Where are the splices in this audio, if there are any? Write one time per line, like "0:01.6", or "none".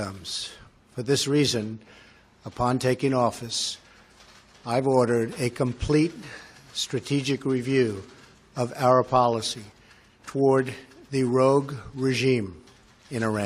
none